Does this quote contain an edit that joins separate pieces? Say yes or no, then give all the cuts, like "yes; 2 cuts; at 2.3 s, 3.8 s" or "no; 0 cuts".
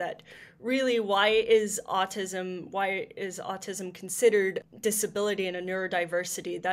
yes; 1 cut; at 4.6 s